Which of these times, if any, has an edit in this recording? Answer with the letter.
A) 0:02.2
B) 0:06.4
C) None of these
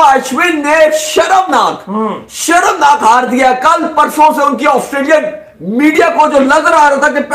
C